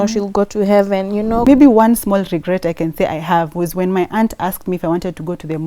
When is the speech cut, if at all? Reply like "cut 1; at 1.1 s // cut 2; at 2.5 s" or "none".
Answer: cut 1; at 1.5 s